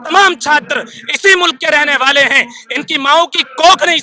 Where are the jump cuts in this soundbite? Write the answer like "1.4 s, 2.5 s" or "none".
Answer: none